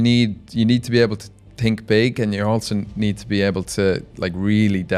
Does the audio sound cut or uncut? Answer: uncut